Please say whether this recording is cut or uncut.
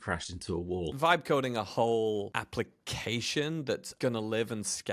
cut